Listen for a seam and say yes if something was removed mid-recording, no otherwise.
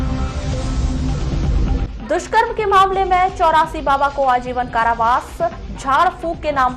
yes